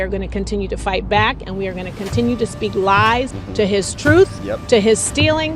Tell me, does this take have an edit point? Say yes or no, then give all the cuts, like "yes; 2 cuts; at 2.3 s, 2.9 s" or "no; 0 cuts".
no; 0 cuts